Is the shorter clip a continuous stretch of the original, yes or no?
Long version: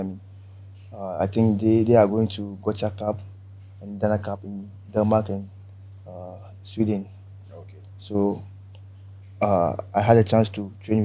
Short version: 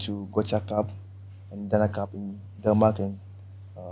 yes